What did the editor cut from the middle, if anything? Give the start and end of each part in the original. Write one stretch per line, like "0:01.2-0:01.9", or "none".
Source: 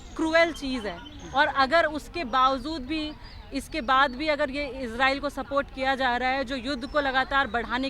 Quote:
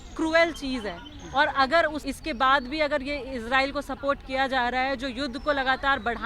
0:02.0-0:03.5

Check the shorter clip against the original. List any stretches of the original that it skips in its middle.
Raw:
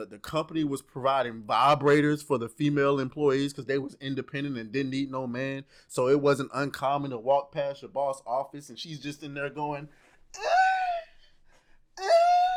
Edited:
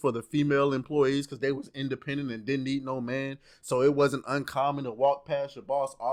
none

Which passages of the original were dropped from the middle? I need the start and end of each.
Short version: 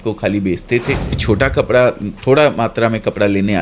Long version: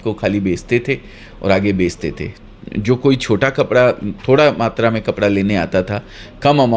0:01.2-0:03.2

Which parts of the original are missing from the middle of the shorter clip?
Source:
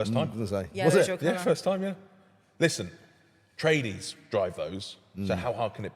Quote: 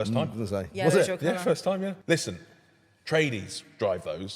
0:02.0-0:02.5

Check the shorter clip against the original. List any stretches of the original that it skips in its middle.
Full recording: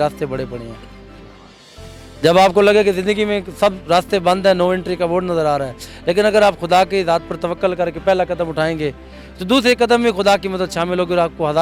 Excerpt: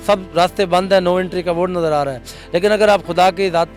none

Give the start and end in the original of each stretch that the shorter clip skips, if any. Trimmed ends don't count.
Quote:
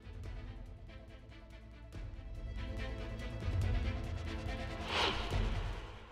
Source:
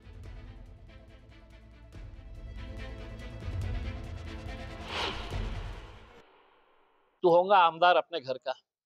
none

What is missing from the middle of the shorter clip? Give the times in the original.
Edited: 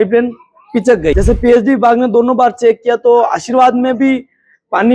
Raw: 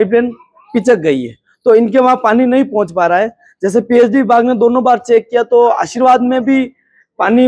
0:01.1-0:03.6

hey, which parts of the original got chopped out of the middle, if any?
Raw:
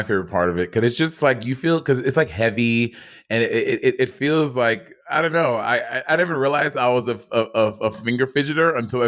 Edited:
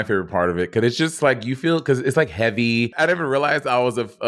0:02.9-0:06.0

